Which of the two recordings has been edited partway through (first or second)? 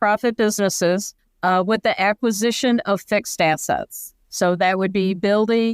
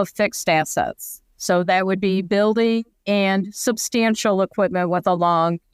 first